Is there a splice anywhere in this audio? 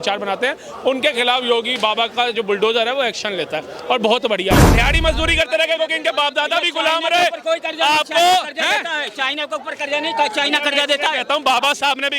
yes; 1 cut; at 4.7 s

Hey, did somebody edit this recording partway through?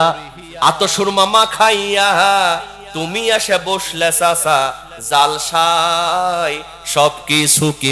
no; 0 cuts

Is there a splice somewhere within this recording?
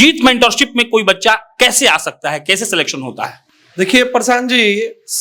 no; 0 cuts

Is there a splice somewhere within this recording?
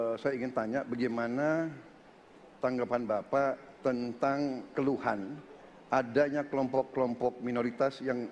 no; 0 cuts

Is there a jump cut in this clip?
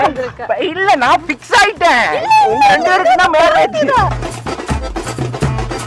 no; 0 cuts

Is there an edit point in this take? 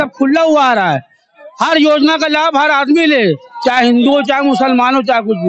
no; 0 cuts

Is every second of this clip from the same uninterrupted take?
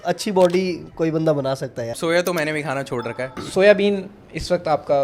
no; 2 cuts; at 2.0 s, 3.4 s

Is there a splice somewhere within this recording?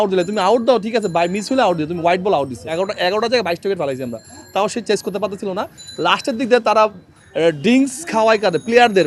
yes; 1 cut; at 2.7 s

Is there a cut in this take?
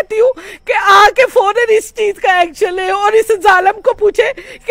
no; 0 cuts

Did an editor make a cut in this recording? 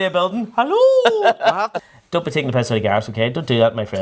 yes; 1 cut; at 1.8 s

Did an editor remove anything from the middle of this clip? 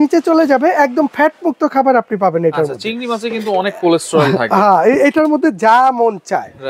no; 0 cuts

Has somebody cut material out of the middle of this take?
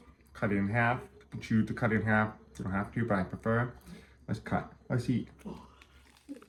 no; 0 cuts

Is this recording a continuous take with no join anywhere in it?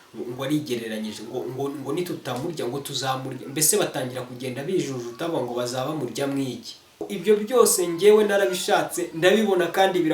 no; 1 cut; at 7.1 s

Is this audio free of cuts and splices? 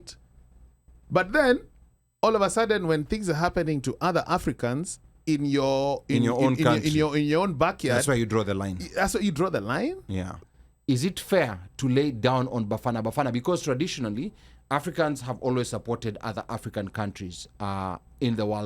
no; 1 cut; at 10.3 s

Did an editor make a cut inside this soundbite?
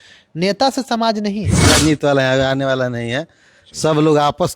yes; 1 cut; at 1.7 s

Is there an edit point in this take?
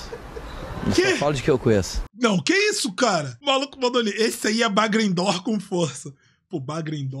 yes; 2 cuts; at 2.0 s, 3.3 s

